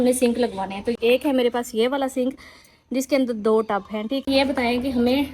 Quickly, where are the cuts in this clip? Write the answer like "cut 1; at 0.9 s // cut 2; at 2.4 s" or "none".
cut 1; at 0.9 s // cut 2; at 4.3 s